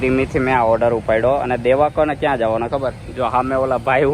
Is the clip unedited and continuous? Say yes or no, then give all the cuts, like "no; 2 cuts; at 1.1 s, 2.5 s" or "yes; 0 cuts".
yes; 0 cuts